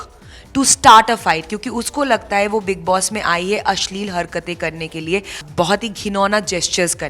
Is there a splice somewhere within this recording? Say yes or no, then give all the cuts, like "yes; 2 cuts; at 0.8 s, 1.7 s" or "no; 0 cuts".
yes; 1 cut; at 5.4 s